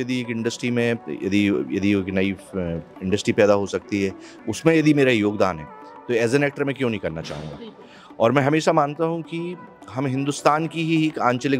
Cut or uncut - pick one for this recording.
uncut